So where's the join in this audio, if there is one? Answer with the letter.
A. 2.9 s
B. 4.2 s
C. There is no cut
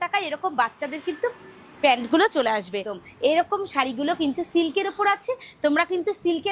A